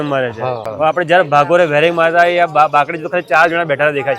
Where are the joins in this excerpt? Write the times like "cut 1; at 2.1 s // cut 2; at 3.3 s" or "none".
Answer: cut 1; at 0.9 s